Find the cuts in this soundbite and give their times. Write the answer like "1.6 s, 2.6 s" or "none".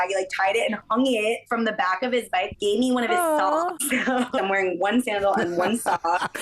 2.5 s, 4.4 s